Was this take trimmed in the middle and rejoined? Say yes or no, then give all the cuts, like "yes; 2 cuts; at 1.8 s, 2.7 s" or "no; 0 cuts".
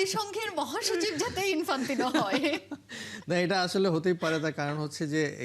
no; 0 cuts